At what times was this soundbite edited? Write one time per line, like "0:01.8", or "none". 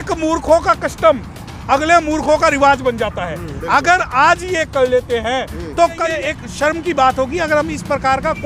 0:06.1